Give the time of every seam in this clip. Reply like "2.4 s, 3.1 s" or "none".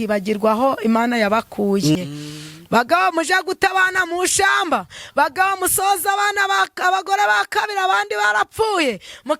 2.0 s